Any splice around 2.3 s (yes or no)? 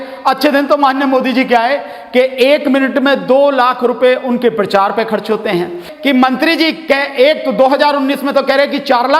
no